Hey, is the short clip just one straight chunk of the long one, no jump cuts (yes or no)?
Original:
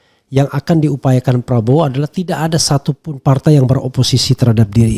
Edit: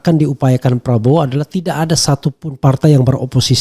yes